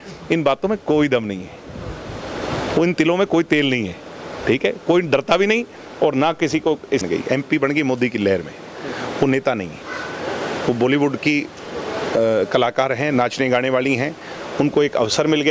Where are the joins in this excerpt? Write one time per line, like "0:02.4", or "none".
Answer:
0:07.0